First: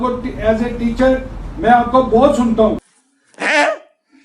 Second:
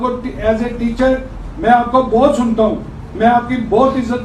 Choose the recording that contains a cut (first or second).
first